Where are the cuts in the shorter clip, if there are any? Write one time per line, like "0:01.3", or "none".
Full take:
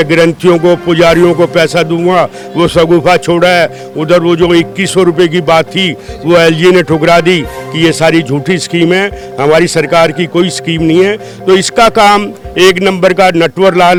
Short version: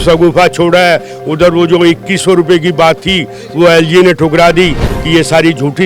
none